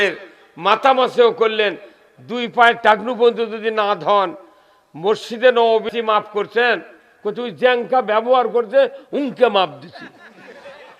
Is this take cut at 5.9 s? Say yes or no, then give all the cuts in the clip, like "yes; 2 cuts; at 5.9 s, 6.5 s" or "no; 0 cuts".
yes; 1 cut; at 5.9 s